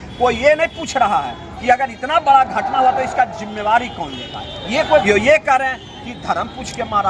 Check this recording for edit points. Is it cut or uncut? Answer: cut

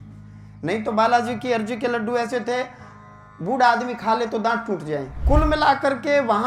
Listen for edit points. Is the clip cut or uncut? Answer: cut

